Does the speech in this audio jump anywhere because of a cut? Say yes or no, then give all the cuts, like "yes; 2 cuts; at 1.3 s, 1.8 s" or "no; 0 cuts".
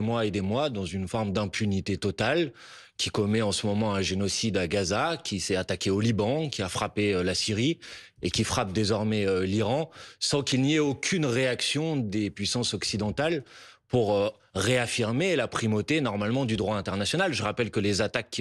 no; 0 cuts